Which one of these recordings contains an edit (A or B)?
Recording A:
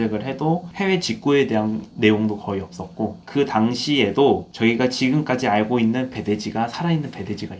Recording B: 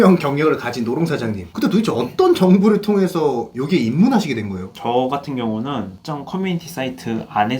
B